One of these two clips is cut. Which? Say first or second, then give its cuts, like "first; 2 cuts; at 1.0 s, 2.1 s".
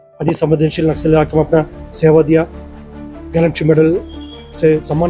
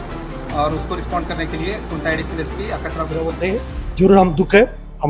second; 1 cut; at 3.2 s